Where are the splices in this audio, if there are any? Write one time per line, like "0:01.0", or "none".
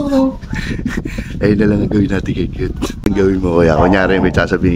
0:03.0